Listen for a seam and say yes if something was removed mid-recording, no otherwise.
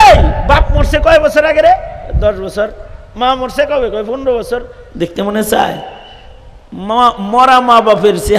no